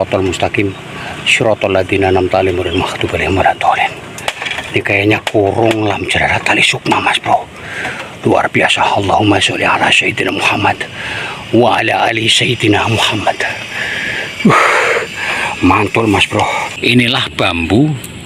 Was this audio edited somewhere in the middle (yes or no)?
yes